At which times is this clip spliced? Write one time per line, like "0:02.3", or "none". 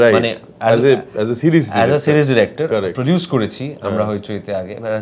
none

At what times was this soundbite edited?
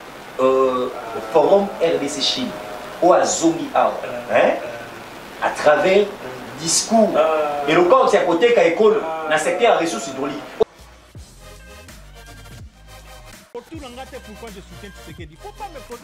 0:10.6

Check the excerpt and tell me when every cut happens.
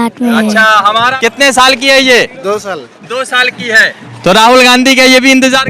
0:01.1

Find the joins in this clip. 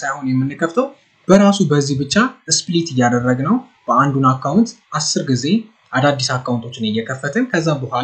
none

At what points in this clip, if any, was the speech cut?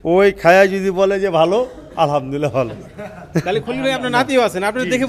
none

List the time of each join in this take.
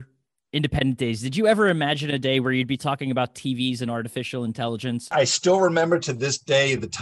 0:05.1

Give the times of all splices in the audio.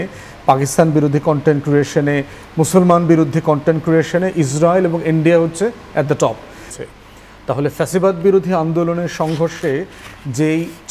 0:06.7

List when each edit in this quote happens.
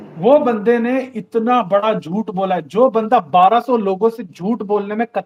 none

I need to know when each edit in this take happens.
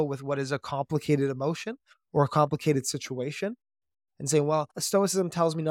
0:04.0
0:04.8

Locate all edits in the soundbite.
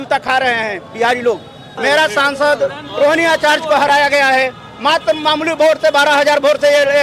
0:01.7

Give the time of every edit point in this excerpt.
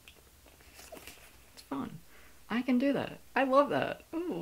0:01.6

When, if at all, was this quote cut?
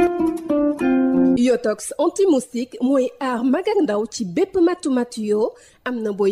0:01.3

